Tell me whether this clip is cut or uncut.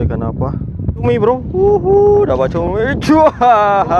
cut